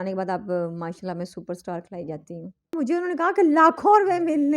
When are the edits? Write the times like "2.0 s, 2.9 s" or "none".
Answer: 2.7 s